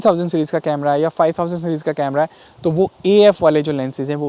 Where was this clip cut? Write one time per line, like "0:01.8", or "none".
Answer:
none